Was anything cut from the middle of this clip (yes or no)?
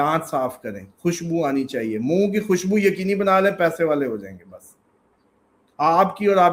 no